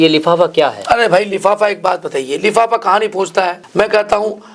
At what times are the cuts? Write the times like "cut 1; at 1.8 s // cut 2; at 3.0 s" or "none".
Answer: cut 1; at 3.6 s